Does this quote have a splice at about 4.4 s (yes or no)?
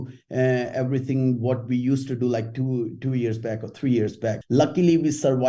yes